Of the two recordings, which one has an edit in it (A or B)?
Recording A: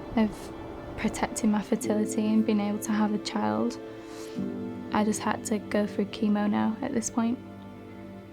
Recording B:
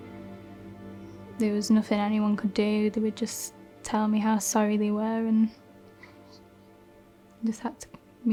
A